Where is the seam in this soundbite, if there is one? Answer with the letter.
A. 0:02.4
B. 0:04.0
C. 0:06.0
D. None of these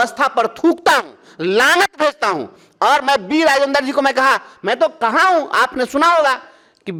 D